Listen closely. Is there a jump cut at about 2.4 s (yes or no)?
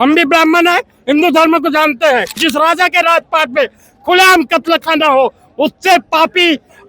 yes